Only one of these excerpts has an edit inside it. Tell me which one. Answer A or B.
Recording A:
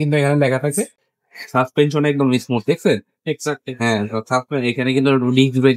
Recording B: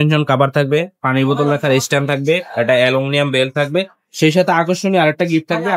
A